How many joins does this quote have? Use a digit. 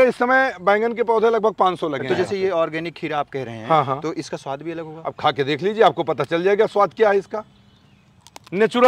1